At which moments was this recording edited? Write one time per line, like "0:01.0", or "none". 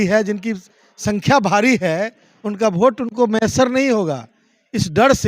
none